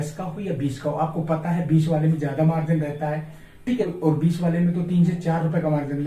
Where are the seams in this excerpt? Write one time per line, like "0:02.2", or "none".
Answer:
0:03.9